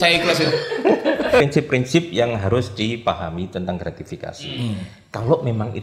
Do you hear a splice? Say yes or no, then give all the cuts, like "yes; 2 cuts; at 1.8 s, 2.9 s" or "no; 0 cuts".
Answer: yes; 1 cut; at 1.4 s